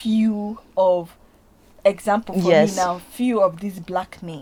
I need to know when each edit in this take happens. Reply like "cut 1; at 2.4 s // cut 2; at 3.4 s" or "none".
none